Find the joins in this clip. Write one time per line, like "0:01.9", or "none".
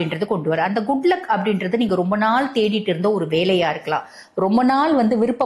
none